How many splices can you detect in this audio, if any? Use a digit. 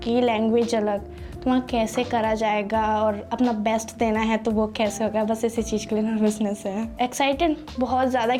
0